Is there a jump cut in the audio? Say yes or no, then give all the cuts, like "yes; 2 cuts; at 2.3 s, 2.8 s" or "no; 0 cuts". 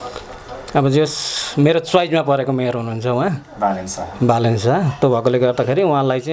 no; 0 cuts